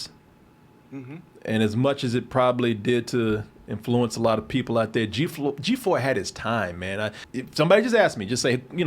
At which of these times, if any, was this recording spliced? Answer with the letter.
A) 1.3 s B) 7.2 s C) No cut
B